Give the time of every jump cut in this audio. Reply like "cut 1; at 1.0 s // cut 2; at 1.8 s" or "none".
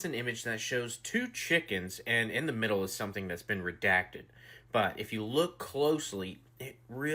none